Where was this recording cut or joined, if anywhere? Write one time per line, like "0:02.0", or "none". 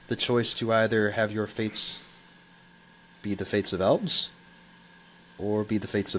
none

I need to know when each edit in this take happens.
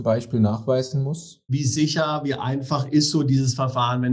0:01.6

